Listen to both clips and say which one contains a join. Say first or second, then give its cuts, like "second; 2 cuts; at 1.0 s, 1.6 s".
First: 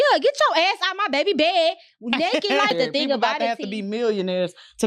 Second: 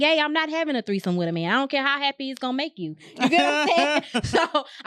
first; 1 cut; at 2.7 s